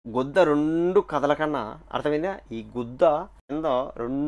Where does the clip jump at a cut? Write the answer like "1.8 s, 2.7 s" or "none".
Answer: 3.4 s